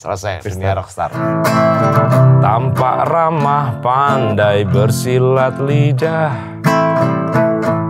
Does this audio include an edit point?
yes; 1 cut; at 1.2 s

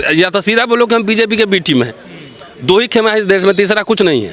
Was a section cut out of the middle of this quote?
no; 0 cuts

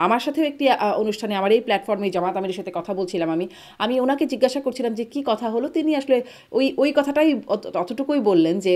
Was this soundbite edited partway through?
no; 0 cuts

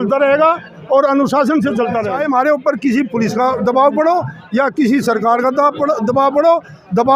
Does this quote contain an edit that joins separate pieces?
yes; 1 cut; at 2.1 s

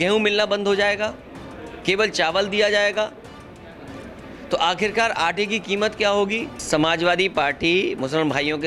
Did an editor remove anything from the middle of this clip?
yes; 1 cut; at 6.5 s

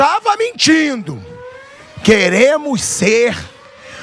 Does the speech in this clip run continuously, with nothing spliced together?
yes; 0 cuts

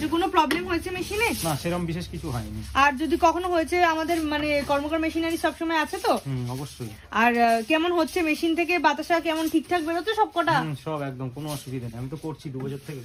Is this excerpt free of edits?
yes; 0 cuts

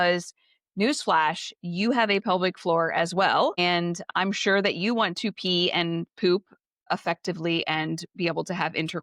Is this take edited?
yes; 1 cut; at 6.9 s

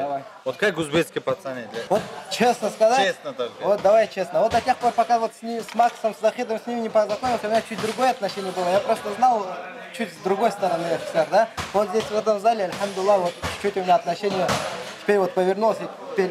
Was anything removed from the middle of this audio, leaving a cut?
yes; 1 cut; at 1.7 s

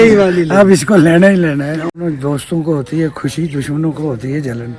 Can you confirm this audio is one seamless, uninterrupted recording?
no; 1 cut; at 2.0 s

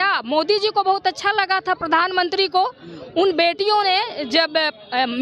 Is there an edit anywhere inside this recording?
no; 0 cuts

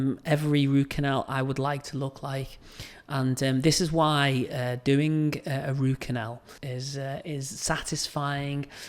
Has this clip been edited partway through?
yes; 1 cut; at 6.5 s

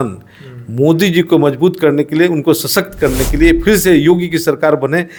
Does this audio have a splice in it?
no; 0 cuts

